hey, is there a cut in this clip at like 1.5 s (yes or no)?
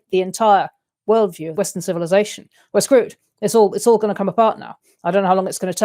yes